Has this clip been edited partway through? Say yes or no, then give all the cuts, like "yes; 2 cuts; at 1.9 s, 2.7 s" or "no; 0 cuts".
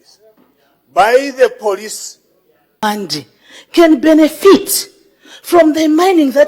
yes; 1 cut; at 2.8 s